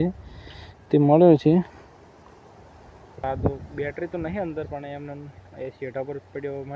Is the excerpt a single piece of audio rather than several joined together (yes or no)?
no